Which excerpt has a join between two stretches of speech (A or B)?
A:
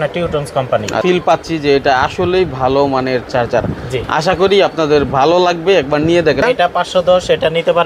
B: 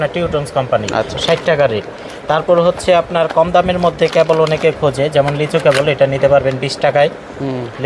A